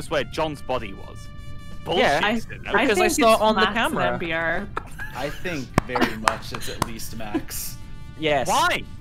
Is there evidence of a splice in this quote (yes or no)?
no